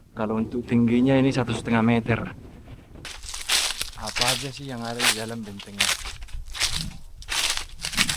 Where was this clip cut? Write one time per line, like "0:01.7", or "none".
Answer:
0:03.0